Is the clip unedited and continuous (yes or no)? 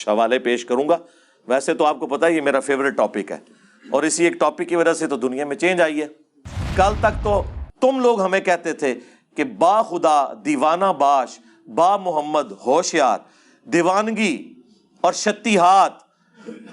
no